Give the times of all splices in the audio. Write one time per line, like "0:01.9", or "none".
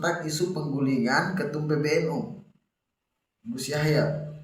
none